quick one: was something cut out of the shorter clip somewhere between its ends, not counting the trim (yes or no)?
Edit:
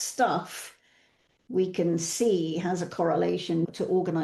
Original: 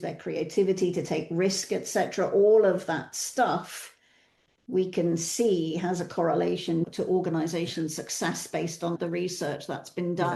no